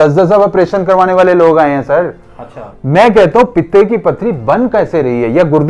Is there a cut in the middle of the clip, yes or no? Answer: no